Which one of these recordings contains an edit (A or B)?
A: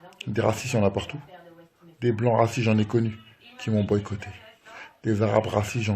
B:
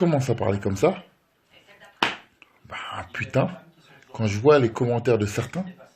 A